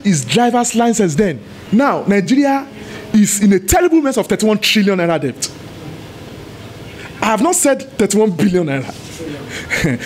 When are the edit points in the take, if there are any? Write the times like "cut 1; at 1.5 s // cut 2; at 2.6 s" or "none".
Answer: cut 1; at 1.6 s